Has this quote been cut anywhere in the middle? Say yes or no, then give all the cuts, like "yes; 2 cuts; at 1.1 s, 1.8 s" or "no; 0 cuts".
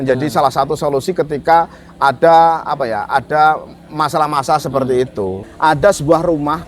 yes; 1 cut; at 5.4 s